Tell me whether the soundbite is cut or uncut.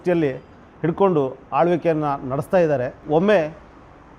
cut